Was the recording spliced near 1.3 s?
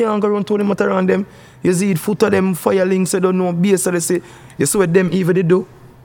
no; 1 cut; at 4.4 s

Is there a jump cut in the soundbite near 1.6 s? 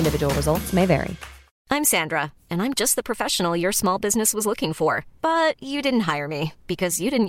yes; 1 cut; at 1.6 s

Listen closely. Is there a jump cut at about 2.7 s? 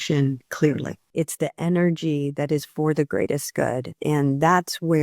no; 2 cuts; at 1.0 s, 4.0 s

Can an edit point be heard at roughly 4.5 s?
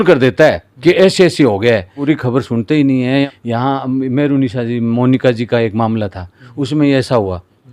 no; 2 cuts; at 1.9 s, 3.2 s

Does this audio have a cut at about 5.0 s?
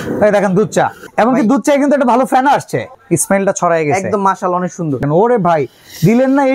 yes; 3 cuts; at 1.0 s, 3.0 s, 5.0 s

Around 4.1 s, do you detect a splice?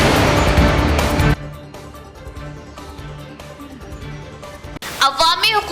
no; 1 cut; at 1.0 s

